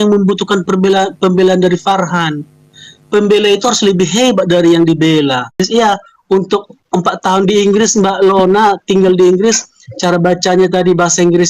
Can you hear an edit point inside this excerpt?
yes; 1 cut; at 5.6 s

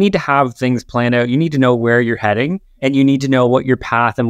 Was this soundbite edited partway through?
yes; 1 cut; at 2.6 s

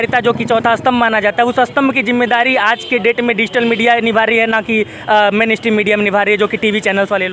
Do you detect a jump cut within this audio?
no; 0 cuts

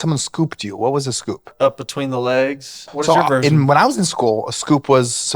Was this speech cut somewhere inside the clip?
yes; 2 cuts; at 1.5 s, 2.9 s

